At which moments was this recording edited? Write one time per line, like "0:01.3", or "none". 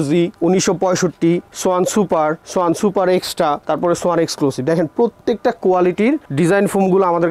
none